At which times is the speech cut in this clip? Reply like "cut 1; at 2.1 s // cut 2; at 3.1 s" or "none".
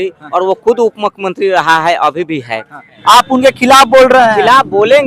cut 1; at 2.9 s